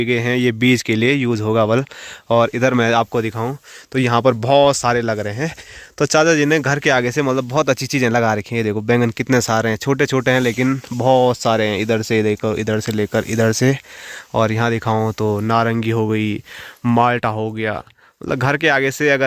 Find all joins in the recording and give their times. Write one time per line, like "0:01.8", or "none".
none

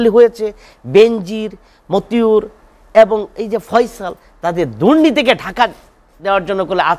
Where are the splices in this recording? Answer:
none

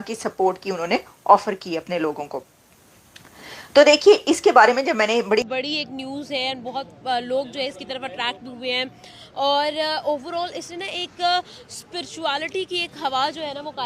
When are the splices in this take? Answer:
0:05.5

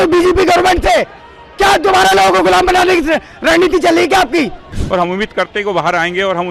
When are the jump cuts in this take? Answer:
0:04.7

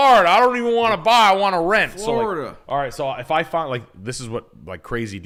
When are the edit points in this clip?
none

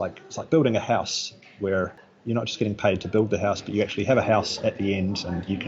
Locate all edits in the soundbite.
0:02.1

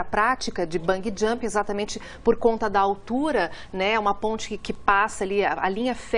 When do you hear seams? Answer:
0:02.0

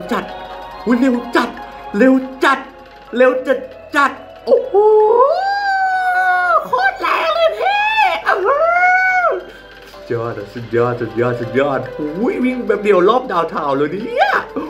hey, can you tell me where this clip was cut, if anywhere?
none

